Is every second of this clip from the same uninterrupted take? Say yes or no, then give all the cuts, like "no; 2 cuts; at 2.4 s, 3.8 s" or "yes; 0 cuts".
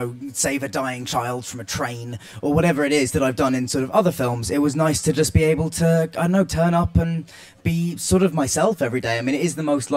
no; 1 cut; at 2.5 s